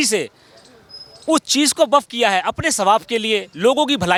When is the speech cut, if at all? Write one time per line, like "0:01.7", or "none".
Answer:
none